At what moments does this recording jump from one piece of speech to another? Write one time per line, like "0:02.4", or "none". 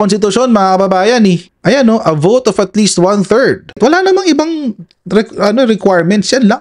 0:03.8